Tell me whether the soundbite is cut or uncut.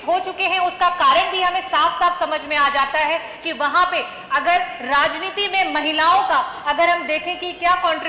uncut